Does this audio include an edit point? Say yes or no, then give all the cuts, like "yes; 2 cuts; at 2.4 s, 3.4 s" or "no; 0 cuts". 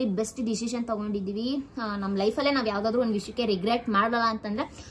no; 0 cuts